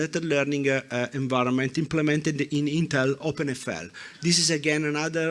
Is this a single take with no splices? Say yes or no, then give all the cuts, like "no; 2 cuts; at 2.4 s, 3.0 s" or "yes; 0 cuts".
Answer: no; 1 cut; at 3.2 s